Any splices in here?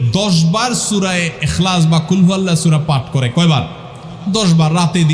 no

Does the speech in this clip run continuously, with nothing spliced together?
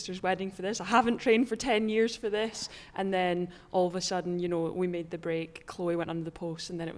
yes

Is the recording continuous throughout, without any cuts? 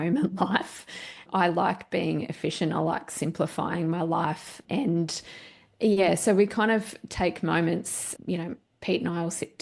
yes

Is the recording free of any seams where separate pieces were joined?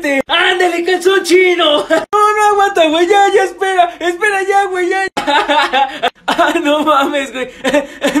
yes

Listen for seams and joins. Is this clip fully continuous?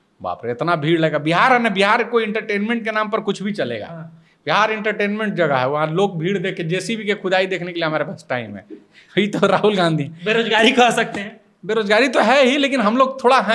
yes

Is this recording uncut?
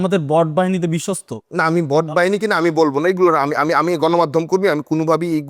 yes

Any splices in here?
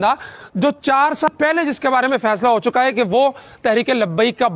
yes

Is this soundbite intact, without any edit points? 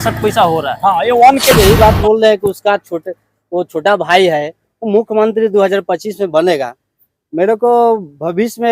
no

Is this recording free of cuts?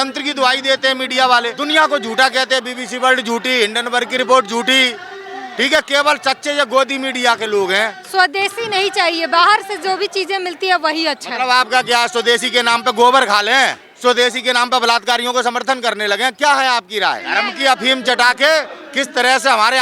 no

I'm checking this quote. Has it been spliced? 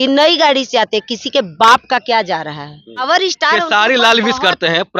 no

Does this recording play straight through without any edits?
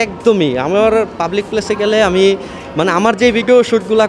yes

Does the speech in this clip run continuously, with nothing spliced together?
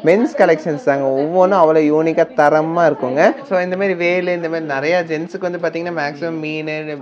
no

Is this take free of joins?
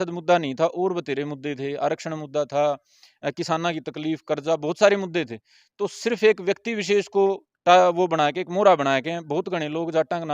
yes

